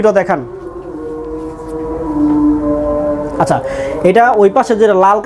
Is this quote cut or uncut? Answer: uncut